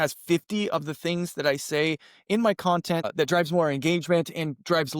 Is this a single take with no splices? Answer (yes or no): no